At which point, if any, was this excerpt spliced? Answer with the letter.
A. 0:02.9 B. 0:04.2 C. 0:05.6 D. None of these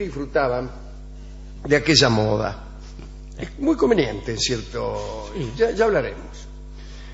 D